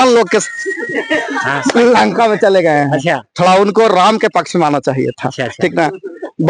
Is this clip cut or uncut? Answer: uncut